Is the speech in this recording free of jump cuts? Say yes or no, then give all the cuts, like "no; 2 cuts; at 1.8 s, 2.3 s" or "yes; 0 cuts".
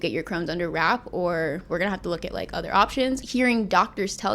no; 2 cuts; at 1.6 s, 3.2 s